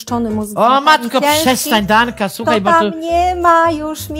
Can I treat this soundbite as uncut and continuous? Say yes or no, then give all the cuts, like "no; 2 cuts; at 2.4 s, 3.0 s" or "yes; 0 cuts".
yes; 0 cuts